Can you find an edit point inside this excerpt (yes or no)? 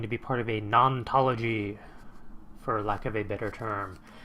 yes